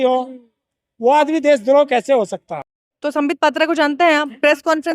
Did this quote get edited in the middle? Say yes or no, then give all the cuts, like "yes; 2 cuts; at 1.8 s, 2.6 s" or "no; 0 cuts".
yes; 1 cut; at 2.8 s